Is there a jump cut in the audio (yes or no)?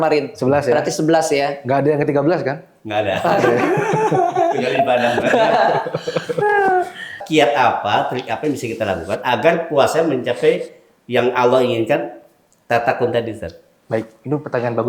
yes